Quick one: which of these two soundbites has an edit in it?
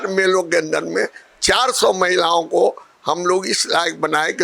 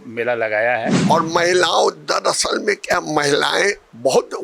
second; 1 cut; at 1.0 s

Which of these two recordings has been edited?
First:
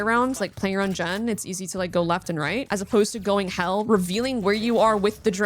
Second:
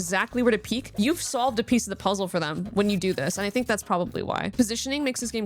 second; 1 cut; at 4.5 s

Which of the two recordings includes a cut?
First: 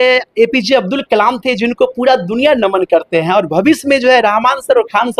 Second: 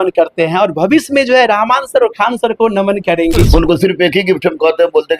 second; 1 cut; at 3.4 s

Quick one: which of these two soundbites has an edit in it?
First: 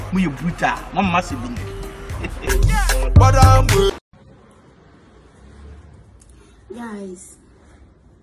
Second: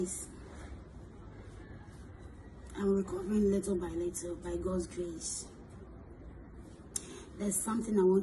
first; 1 cut; at 4.1 s

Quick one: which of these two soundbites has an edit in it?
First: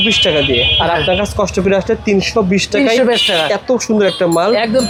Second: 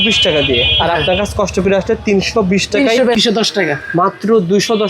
second; 1 cut; at 3.2 s

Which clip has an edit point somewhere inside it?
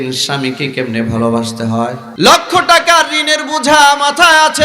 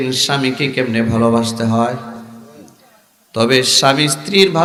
first; 1 cut; at 2.0 s

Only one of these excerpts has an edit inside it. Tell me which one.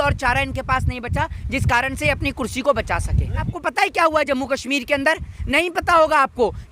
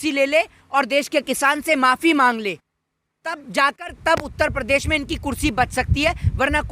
first; 1 cut; at 3.5 s

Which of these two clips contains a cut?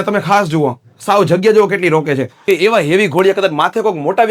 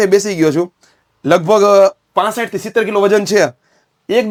first; 1 cut; at 2.3 s

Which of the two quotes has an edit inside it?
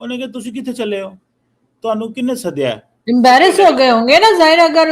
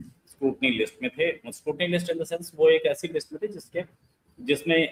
first; 1 cut; at 2.9 s

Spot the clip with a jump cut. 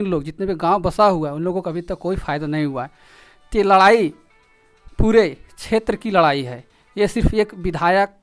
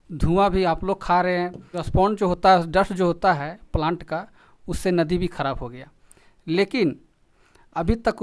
second; 1 cut; at 2.2 s

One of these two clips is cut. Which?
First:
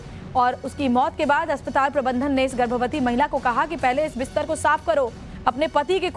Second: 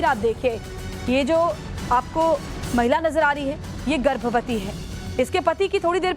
second; 1 cut; at 2.5 s

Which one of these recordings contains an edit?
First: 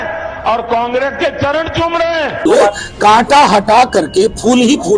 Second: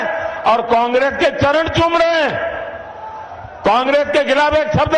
first; 1 cut; at 2.3 s

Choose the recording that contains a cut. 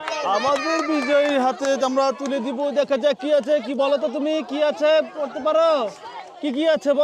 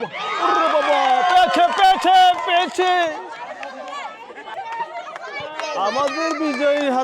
second; 1 cut; at 4.5 s

